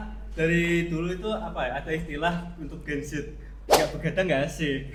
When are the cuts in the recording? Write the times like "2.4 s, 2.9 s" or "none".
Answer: none